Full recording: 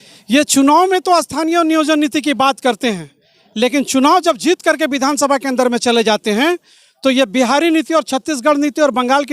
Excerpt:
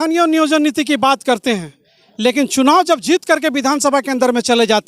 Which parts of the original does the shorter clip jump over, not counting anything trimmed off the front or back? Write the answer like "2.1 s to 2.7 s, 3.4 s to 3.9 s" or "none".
none